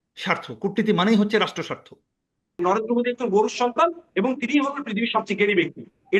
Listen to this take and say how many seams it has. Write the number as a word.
one